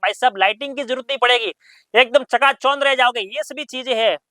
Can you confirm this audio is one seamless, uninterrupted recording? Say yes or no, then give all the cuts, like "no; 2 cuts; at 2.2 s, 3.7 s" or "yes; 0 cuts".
yes; 0 cuts